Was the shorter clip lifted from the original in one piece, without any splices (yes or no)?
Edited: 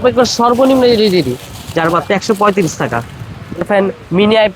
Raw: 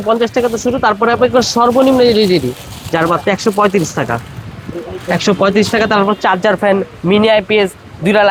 no